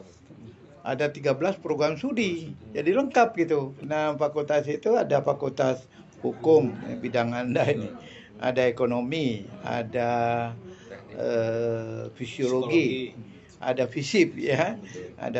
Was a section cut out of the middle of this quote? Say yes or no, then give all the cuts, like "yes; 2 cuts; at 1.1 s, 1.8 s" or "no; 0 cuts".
yes; 1 cut; at 3.8 s